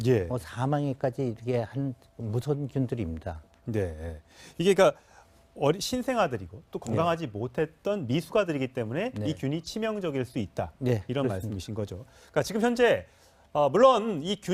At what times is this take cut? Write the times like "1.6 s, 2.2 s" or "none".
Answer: none